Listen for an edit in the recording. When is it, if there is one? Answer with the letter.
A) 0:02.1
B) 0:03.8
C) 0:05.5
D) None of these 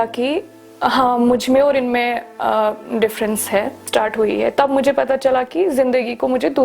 B